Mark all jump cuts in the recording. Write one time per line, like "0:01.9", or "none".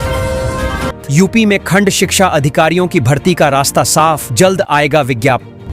0:01.0